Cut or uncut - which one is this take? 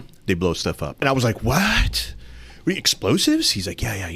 cut